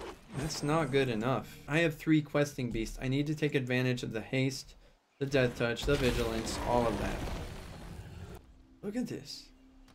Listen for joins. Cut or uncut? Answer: cut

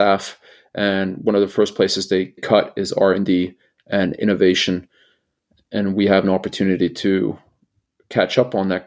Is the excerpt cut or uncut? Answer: cut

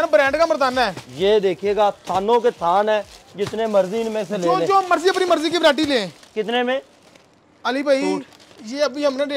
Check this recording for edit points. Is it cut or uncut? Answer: uncut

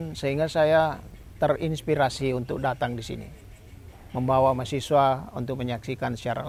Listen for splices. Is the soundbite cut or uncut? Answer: uncut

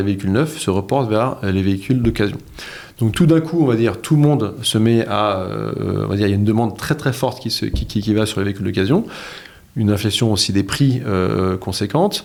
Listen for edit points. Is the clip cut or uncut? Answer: uncut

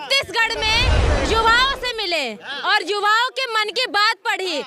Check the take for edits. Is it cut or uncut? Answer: uncut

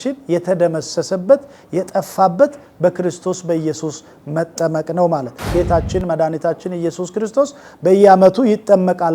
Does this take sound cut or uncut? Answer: cut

